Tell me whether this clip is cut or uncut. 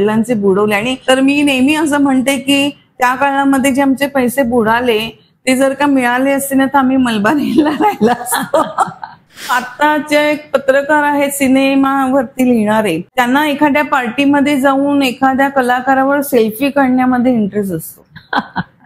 cut